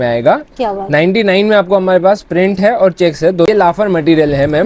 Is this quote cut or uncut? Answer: cut